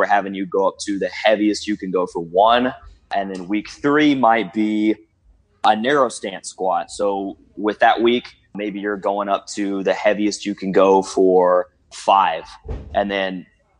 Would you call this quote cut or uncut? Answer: cut